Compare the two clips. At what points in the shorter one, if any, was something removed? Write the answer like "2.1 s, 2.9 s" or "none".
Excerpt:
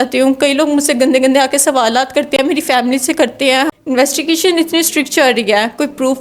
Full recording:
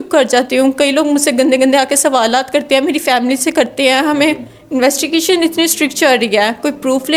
3.7 s